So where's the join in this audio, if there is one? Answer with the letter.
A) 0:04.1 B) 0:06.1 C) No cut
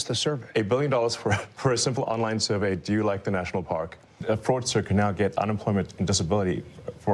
A